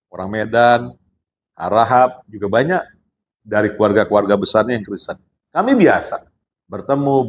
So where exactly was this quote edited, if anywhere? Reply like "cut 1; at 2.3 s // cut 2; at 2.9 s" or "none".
none